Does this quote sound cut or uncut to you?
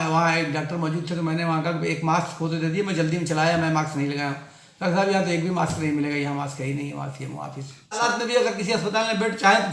cut